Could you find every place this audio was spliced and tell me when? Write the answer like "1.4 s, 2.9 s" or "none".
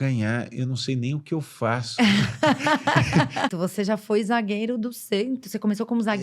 3.5 s